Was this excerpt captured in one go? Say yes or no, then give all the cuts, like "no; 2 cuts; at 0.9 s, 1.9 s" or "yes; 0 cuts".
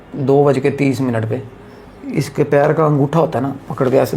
yes; 0 cuts